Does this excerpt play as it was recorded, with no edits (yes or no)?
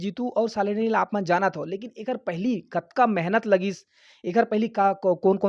yes